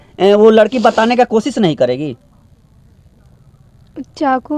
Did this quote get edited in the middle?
no; 0 cuts

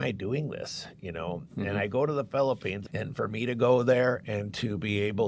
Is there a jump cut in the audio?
no; 0 cuts

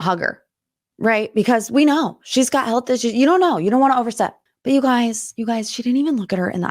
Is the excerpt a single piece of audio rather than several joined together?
no; 1 cut; at 4.5 s

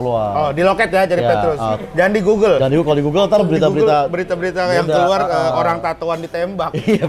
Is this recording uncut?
yes; 0 cuts

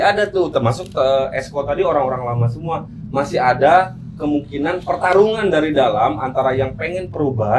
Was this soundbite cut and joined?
no; 0 cuts

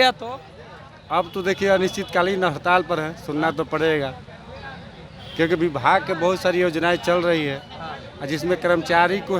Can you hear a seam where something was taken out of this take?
no; 0 cuts

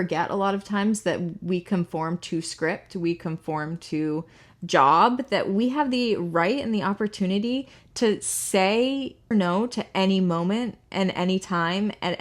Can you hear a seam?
yes; 1 cut; at 9.3 s

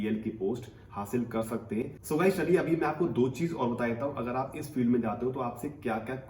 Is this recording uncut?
yes; 0 cuts

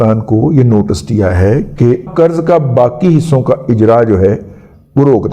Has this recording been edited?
yes; 1 cut; at 2.1 s

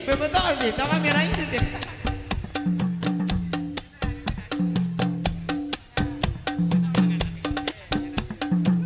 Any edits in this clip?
no; 0 cuts

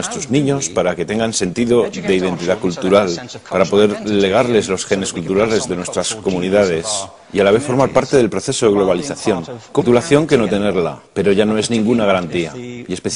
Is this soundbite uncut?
yes; 0 cuts

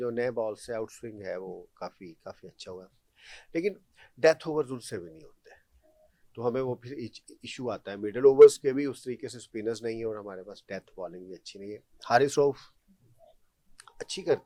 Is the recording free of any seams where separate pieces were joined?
yes; 0 cuts

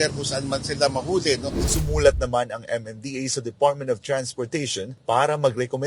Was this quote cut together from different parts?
yes; 1 cut; at 1.6 s

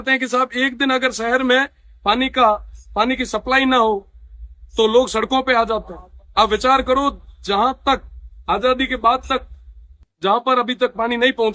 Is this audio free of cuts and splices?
yes; 0 cuts

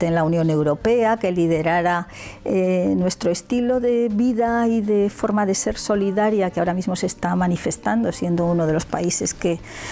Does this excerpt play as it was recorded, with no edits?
yes; 0 cuts

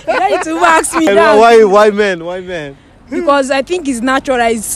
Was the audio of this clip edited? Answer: yes; 1 cut; at 1.1 s

